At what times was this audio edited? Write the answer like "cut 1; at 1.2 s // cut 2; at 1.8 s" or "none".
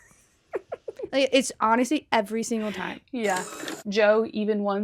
cut 1; at 3.6 s